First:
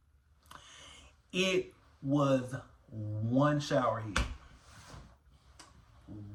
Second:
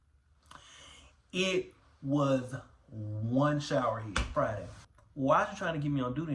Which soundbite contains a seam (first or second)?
second